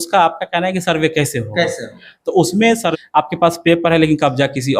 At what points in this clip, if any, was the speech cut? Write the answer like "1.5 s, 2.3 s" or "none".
2.9 s